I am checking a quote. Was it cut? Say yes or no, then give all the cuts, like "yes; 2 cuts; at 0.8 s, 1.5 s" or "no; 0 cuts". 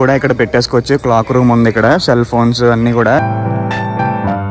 yes; 1 cut; at 3.2 s